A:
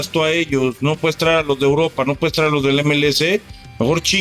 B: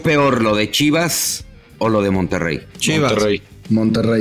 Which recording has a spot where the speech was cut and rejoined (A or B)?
B